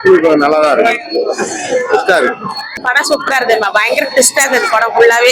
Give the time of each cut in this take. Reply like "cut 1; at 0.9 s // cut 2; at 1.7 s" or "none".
cut 1; at 2.8 s